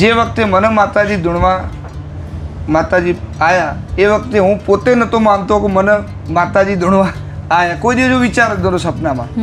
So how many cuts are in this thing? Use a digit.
0